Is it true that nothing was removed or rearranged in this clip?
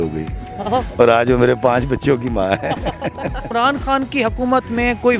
no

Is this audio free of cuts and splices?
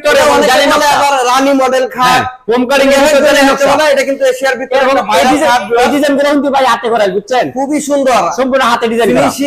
yes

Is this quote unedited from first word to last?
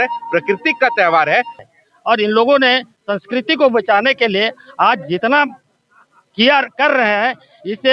no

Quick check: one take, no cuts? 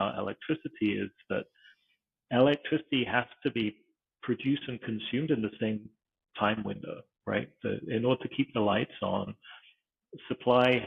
yes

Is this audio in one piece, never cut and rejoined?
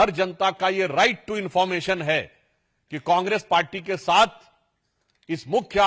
yes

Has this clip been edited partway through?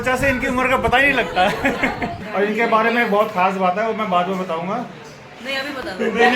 yes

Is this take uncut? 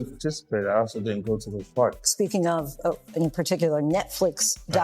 no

